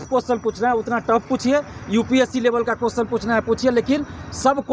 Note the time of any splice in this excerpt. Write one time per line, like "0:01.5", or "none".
none